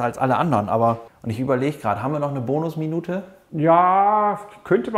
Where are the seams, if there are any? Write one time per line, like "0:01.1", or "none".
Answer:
0:01.0
0:03.4